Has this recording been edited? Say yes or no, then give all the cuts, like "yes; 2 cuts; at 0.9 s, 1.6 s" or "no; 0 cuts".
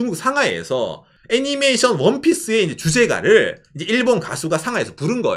no; 0 cuts